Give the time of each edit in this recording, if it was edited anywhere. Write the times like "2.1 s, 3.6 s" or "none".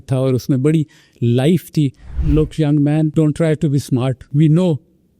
2.1 s, 3.1 s, 4.2 s